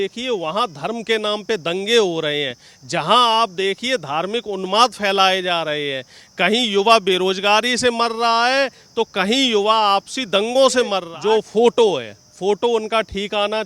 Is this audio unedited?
no; 1 cut; at 11.1 s

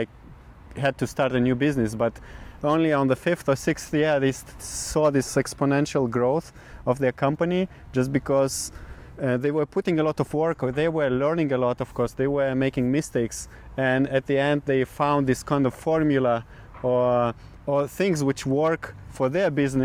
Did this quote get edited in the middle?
no; 0 cuts

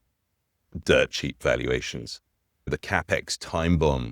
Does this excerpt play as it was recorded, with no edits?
no; 1 cut; at 2.7 s

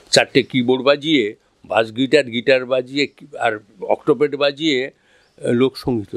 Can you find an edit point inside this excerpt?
no; 0 cuts

